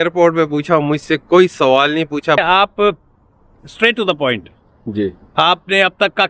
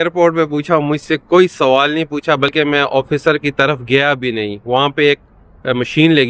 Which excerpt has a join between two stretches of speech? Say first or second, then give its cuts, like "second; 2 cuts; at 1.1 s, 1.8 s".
first; 1 cut; at 2.4 s